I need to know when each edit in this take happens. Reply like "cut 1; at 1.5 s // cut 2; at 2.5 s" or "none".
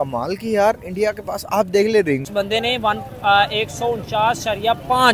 cut 1; at 2.3 s